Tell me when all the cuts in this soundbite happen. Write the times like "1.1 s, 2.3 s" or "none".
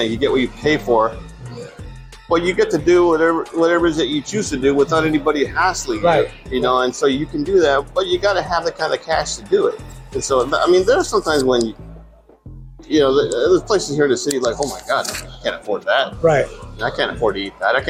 none